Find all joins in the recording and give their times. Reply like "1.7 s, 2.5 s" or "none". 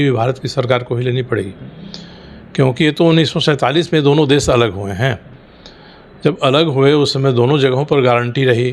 none